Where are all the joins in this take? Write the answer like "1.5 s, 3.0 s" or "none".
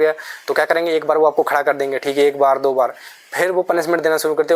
none